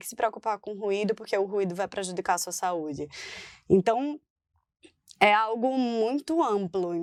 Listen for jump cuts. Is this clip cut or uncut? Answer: uncut